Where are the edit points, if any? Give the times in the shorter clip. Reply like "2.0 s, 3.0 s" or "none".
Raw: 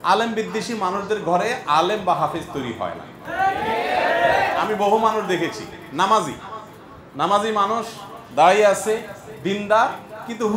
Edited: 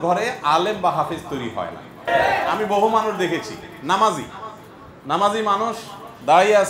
2.1 s